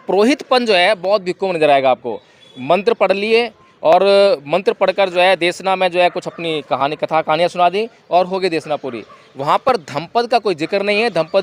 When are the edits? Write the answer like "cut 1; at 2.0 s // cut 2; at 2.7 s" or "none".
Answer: none

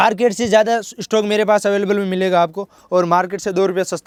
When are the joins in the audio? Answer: none

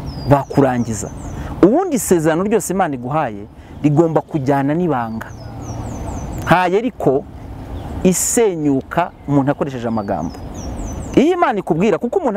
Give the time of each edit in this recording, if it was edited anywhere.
none

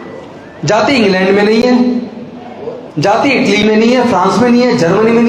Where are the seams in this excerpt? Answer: none

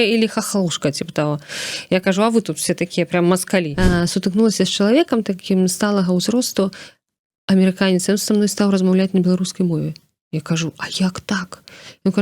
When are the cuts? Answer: cut 1; at 3.7 s

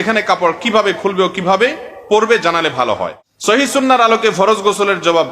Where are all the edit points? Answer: cut 1; at 3.2 s

